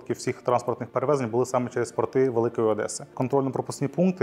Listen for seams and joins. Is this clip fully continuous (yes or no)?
no